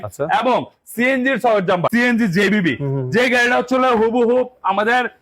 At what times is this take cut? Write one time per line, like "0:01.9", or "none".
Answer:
0:01.9